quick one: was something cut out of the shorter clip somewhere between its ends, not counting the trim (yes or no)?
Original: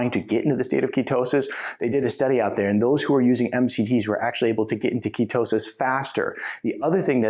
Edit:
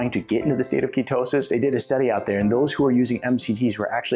yes